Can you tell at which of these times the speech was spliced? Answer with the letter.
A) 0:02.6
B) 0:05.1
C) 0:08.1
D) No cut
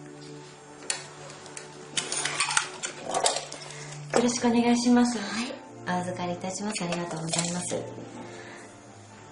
D